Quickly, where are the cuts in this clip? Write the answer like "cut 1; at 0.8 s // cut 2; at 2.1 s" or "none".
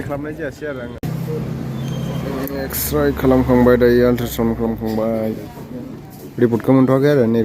cut 1; at 0.9 s